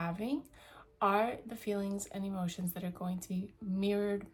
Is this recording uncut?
yes; 0 cuts

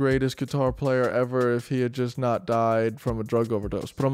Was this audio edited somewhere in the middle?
no; 0 cuts

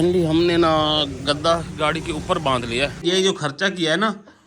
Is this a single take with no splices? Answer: no; 1 cut; at 3.0 s

